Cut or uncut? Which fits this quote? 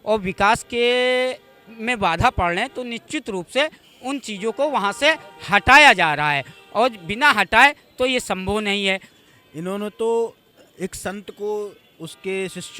cut